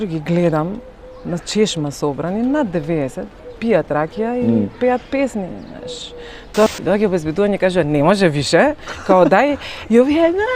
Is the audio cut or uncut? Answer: cut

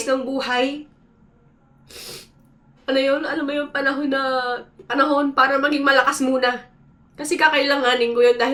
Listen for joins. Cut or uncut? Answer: uncut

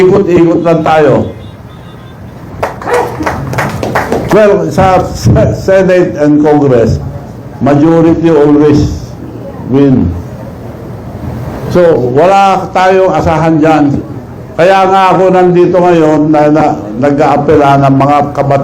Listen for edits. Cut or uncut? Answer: cut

